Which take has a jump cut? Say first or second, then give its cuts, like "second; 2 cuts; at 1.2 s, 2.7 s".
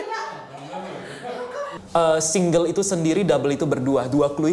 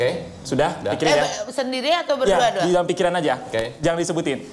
first; 1 cut; at 1.7 s